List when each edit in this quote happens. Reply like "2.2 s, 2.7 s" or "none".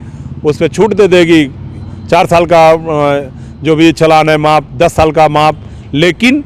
none